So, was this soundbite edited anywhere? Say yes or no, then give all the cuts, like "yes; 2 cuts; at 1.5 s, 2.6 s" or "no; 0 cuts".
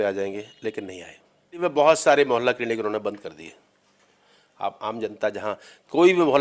yes; 1 cut; at 1.6 s